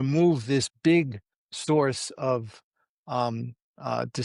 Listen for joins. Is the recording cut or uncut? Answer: uncut